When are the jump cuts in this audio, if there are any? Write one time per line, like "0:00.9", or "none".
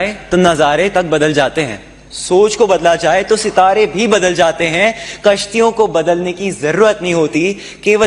none